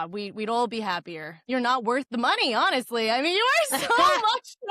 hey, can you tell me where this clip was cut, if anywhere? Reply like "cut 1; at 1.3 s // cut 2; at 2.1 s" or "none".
cut 1; at 1.4 s